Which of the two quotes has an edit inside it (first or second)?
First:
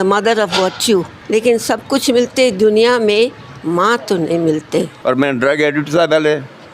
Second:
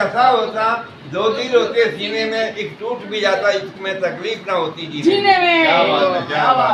first